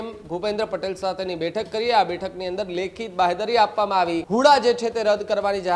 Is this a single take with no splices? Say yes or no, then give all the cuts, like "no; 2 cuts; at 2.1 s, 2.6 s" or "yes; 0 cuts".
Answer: no; 1 cut; at 4.2 s